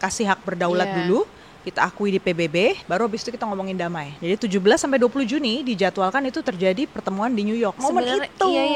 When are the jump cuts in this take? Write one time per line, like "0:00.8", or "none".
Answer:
0:02.8
0:04.1
0:07.8